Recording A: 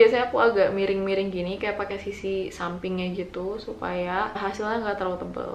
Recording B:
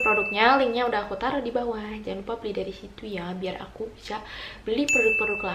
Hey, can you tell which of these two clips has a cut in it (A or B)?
A